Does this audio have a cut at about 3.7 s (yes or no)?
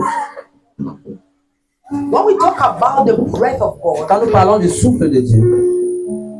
no